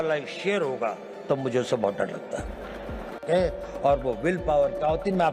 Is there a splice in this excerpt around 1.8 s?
no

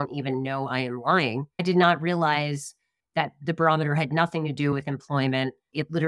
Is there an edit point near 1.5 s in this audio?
yes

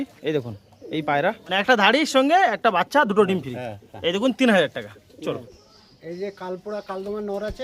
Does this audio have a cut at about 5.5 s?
yes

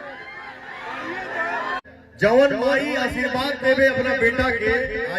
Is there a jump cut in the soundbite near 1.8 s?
yes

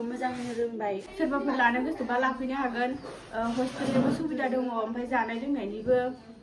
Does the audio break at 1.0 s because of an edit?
yes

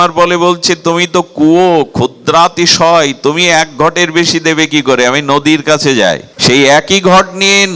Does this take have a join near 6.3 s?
yes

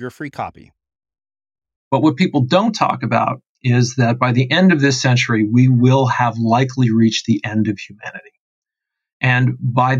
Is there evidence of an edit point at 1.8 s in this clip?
yes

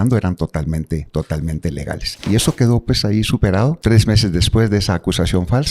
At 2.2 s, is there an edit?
yes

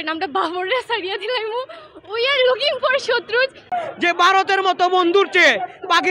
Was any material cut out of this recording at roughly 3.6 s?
yes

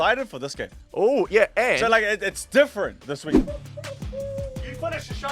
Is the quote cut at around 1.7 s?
no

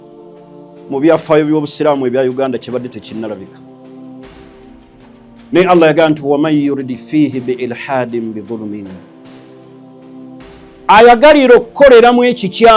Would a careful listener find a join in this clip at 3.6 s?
yes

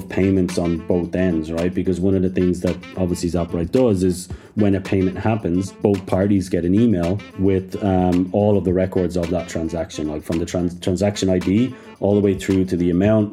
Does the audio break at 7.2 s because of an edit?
yes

